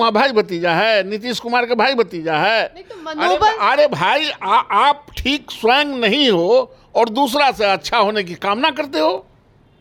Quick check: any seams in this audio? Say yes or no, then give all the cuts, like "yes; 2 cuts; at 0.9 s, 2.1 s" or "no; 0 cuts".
no; 0 cuts